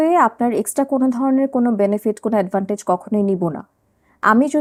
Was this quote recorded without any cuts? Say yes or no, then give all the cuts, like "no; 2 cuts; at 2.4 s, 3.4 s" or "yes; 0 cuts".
yes; 0 cuts